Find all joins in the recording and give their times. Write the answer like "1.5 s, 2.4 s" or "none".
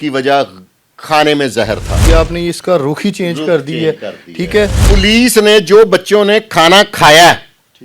2.0 s, 4.8 s